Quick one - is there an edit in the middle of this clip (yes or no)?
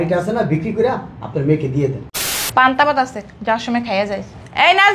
yes